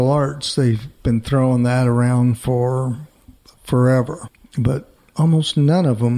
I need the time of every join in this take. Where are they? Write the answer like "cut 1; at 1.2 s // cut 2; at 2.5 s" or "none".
cut 1; at 4.3 s